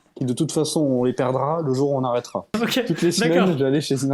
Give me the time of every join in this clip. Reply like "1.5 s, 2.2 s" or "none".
2.5 s